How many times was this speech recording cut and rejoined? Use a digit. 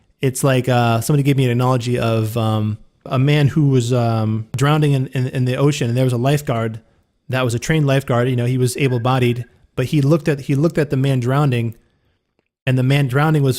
2